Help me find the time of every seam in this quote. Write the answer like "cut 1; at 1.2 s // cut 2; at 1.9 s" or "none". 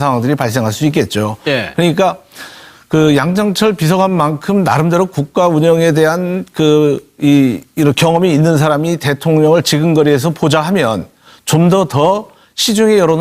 cut 1; at 12.0 s

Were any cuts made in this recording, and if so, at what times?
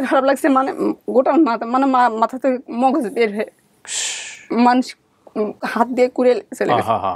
cut 1; at 5.6 s

